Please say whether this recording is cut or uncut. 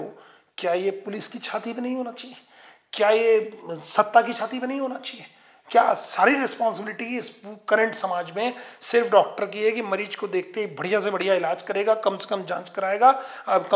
uncut